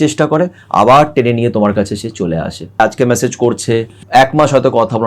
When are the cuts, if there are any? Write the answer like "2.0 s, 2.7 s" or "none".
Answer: 2.8 s, 4.0 s